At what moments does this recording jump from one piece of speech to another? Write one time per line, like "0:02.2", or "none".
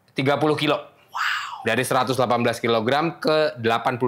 none